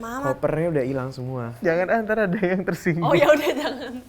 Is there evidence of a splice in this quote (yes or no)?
yes